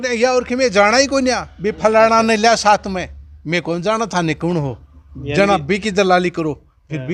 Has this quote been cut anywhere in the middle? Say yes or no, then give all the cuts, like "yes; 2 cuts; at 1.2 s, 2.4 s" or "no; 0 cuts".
no; 0 cuts